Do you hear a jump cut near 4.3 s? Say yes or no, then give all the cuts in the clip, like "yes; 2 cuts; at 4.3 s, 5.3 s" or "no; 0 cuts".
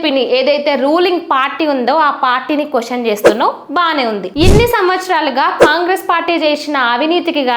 yes; 1 cut; at 4.3 s